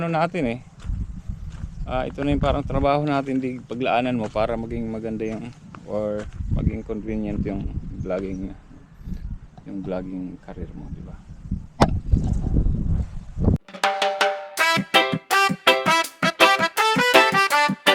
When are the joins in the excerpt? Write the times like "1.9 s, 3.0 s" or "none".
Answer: 13.6 s